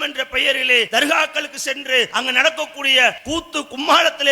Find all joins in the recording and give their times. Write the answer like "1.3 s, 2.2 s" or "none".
0.9 s, 2.1 s, 3.2 s